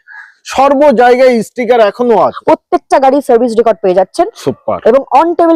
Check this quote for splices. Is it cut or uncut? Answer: cut